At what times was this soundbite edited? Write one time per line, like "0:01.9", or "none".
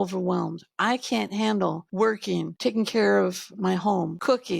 0:02.1
0:03.6